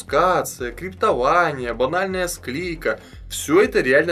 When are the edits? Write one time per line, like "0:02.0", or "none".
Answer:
none